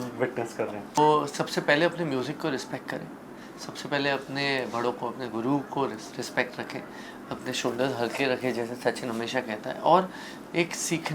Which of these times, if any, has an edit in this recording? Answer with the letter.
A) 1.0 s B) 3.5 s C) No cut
A